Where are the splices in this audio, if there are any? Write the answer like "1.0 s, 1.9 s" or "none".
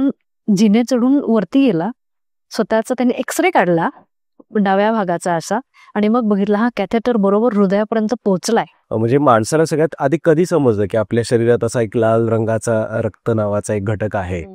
8.8 s